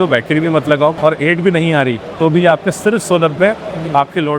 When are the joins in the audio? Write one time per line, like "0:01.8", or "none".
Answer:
0:01.0